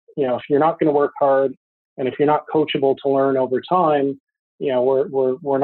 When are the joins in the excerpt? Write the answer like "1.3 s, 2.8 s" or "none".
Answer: none